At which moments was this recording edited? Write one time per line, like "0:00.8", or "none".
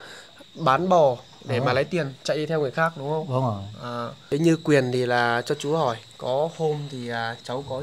0:04.1